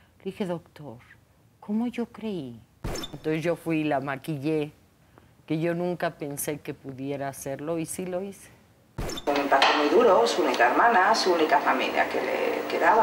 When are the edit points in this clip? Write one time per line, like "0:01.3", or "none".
0:03.1
0:09.3

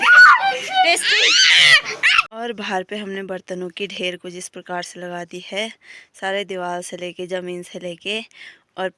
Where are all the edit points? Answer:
0:02.3

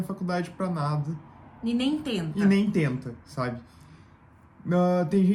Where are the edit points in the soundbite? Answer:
none

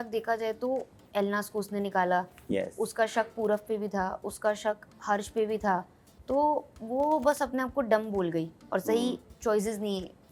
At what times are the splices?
none

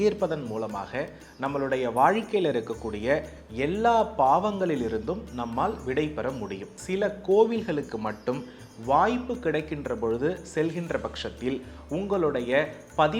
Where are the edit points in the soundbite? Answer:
0:06.7

